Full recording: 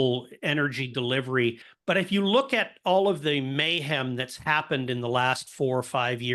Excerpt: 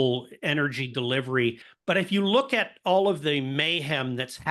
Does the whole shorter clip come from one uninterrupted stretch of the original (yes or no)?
yes